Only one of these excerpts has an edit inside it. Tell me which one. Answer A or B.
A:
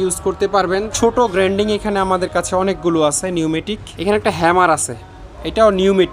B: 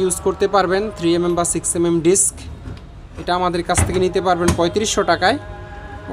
A